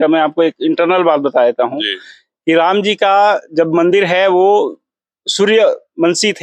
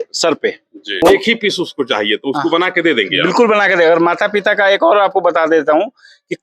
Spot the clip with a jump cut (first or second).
second